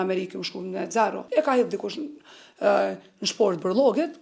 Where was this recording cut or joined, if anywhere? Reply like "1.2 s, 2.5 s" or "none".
1.2 s